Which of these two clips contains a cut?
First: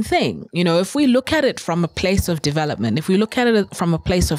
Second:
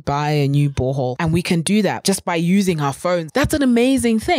second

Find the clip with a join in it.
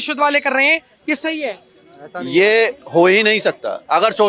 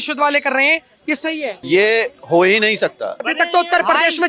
second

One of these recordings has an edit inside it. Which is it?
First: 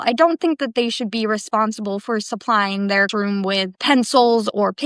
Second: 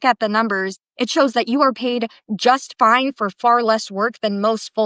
first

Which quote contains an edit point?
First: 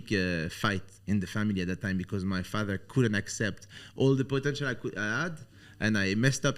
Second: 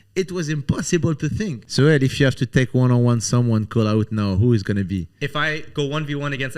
second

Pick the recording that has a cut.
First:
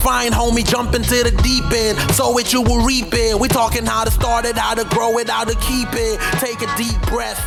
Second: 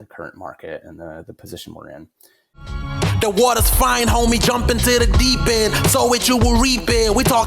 second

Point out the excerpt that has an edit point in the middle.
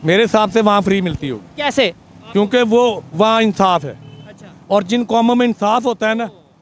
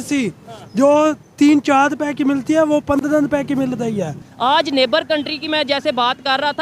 second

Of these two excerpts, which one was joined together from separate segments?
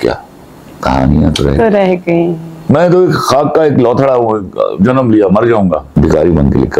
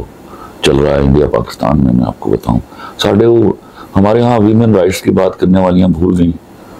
first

